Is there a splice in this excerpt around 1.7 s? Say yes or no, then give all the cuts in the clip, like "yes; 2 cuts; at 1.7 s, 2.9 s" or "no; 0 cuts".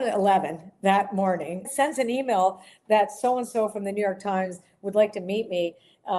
yes; 1 cut; at 1.7 s